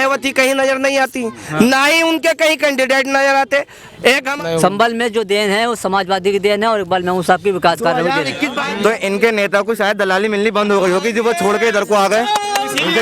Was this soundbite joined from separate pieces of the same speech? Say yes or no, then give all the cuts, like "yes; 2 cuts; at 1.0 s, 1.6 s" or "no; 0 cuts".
yes; 2 cuts; at 4.3 s, 8.6 s